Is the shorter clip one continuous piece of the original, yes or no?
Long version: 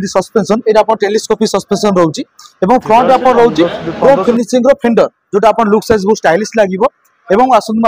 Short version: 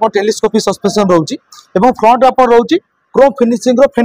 yes